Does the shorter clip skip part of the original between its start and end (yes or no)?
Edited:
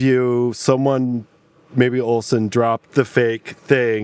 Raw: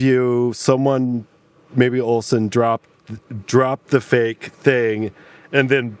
yes